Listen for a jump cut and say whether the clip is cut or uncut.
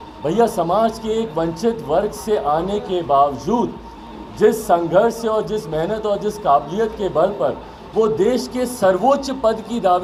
uncut